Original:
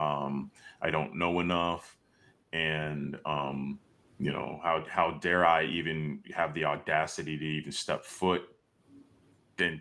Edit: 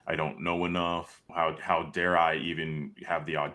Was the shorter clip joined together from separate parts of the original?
yes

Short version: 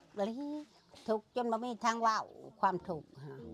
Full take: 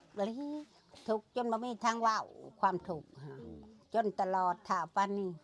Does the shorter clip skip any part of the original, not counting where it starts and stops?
no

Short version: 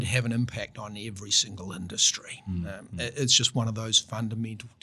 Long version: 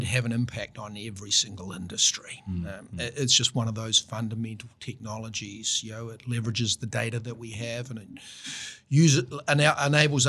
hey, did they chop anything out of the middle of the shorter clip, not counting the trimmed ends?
no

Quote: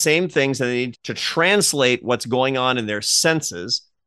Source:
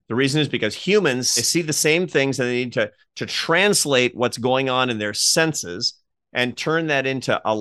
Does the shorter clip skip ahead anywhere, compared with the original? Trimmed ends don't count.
yes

